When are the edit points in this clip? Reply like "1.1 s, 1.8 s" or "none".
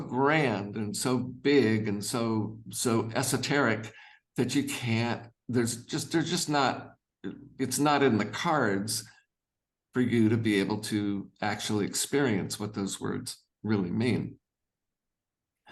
none

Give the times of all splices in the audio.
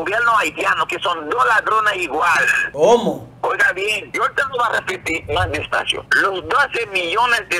2.6 s, 4.0 s, 6.1 s

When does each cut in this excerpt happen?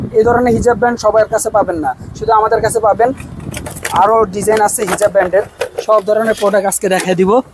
none

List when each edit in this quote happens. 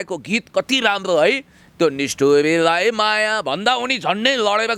none

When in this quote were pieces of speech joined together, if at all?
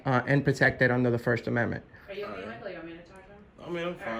none

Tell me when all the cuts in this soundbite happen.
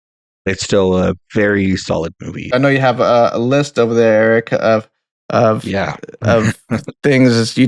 2.5 s

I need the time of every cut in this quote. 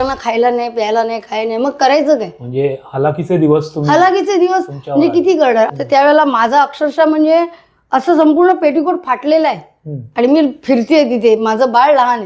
5.7 s

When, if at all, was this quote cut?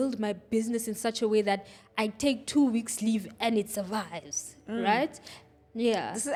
none

